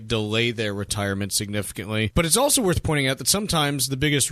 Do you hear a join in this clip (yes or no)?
yes